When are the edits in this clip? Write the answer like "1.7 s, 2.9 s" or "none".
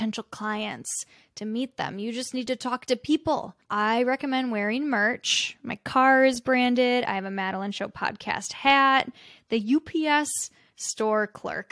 none